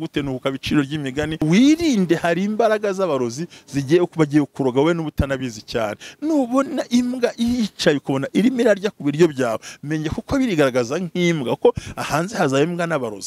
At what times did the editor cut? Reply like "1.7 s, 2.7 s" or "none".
1.4 s